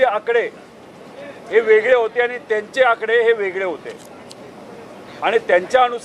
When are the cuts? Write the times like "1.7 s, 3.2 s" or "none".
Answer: none